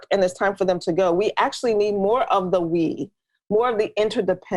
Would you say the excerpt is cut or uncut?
uncut